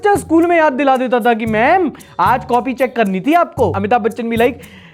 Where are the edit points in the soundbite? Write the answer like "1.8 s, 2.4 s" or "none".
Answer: 3.7 s